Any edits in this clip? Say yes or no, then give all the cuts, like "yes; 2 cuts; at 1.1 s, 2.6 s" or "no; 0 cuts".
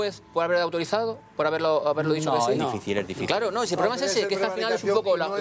no; 0 cuts